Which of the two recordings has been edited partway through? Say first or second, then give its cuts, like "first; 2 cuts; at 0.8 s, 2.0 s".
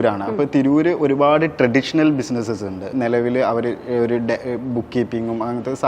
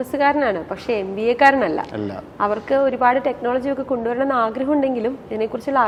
first; 1 cut; at 2.9 s